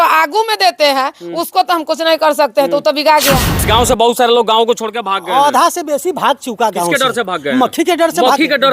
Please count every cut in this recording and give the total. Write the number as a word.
one